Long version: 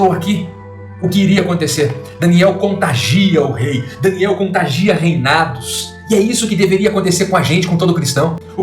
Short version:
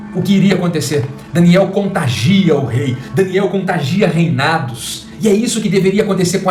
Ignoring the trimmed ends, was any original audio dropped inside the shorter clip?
no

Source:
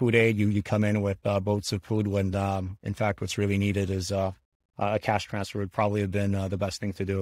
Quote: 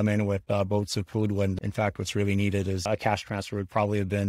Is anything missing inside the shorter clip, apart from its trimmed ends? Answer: yes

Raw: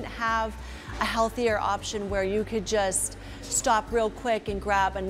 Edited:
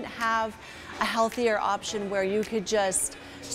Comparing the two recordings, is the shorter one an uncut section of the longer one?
yes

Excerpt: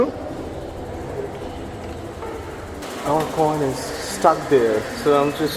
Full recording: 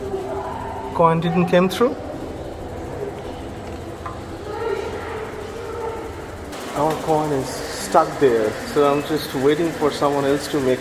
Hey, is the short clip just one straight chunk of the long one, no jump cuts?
no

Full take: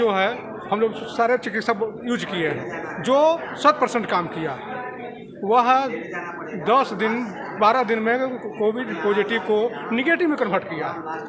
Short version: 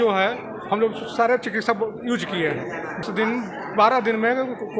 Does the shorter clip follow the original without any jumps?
no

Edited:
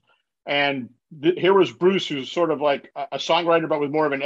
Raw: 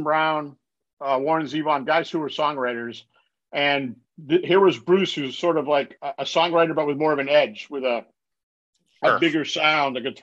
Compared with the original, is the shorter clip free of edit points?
yes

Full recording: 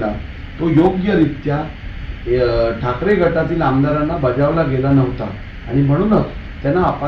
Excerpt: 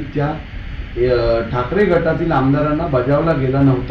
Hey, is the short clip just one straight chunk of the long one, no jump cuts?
yes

